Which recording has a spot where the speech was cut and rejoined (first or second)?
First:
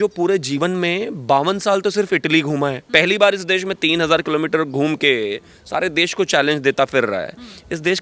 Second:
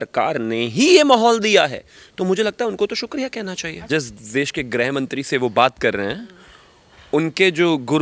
second